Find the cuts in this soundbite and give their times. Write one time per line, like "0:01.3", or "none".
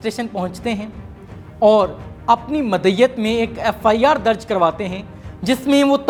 none